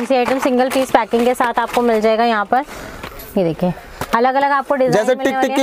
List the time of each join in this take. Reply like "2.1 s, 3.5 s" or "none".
none